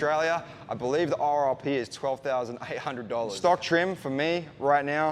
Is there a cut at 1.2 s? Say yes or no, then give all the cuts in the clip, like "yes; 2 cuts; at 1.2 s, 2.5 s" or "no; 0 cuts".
no; 1 cut; at 3.3 s